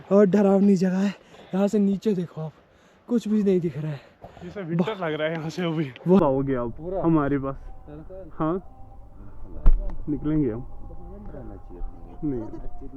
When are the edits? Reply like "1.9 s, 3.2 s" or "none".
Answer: 6.2 s